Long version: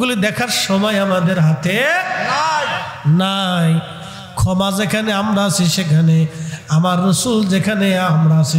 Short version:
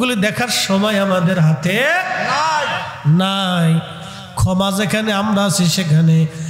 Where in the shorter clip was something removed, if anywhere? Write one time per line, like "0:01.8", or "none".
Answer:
none